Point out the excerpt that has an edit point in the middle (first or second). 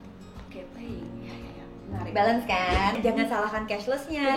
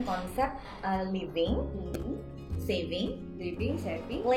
first